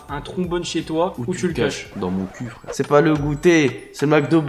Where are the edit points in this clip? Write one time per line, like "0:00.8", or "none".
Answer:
0:01.2
0:02.7